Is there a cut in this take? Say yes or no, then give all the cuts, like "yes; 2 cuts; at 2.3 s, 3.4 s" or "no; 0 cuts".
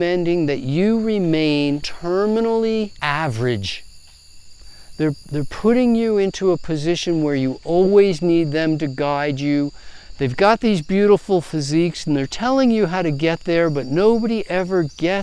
yes; 2 cuts; at 1.9 s, 2.9 s